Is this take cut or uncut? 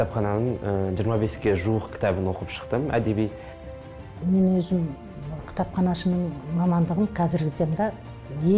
cut